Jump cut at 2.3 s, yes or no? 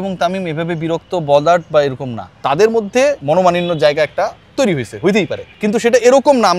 yes